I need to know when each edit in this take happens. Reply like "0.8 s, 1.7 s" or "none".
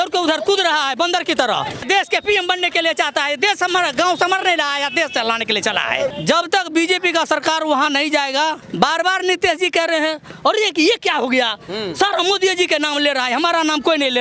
1.8 s, 6.1 s, 8.6 s